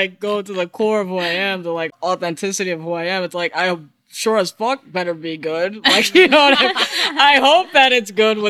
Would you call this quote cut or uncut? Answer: cut